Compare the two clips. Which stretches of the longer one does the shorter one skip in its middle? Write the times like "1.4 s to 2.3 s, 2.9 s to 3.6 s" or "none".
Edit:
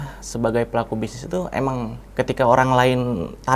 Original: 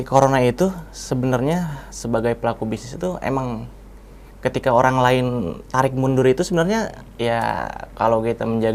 3.7 s to 4.2 s